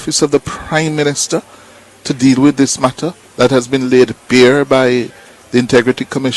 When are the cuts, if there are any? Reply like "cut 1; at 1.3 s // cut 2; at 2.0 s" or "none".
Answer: none